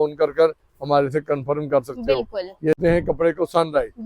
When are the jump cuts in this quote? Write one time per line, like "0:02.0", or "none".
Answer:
0:02.8